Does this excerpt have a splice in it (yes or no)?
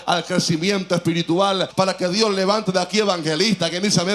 yes